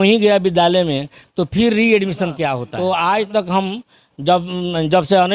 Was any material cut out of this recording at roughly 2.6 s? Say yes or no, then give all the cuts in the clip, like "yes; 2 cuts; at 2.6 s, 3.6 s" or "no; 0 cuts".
yes; 1 cut; at 2.6 s